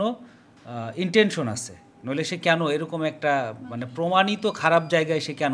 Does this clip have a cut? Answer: no; 0 cuts

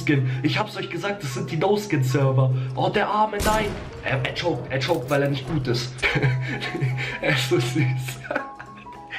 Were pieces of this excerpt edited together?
yes; 1 cut; at 6.0 s

